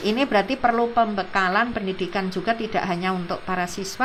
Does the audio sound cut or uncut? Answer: uncut